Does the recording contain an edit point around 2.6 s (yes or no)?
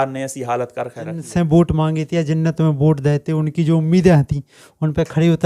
no